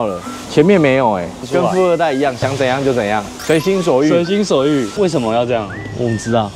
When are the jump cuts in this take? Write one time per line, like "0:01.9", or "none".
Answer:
0:01.4
0:04.9